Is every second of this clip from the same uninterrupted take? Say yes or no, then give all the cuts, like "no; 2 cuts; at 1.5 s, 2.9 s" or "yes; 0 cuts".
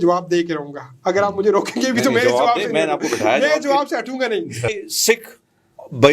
no; 1 cut; at 4.7 s